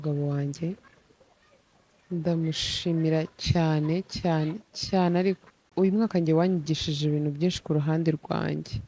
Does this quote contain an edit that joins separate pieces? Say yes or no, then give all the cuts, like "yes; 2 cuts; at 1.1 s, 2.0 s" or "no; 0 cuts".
yes; 1 cut; at 5.6 s